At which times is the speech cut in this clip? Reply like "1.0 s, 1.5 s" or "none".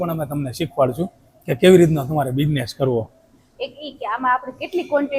none